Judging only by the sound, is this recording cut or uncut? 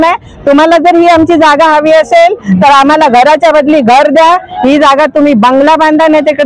uncut